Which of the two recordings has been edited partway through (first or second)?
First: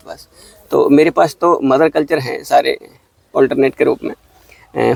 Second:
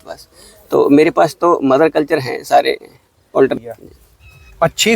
second